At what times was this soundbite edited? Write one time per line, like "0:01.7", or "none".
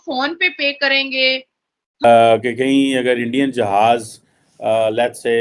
0:02.0